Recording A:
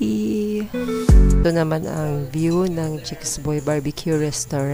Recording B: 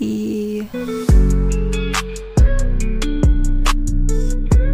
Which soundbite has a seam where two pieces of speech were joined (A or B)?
A